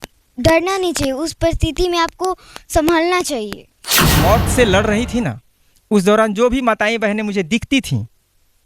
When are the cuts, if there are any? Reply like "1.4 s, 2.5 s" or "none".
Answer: 4.0 s